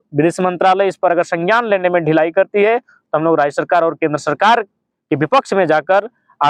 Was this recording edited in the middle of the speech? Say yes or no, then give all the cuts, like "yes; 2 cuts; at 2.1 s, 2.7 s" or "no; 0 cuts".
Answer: no; 0 cuts